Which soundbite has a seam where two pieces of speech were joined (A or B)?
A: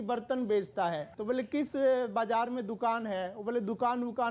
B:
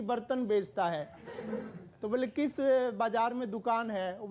A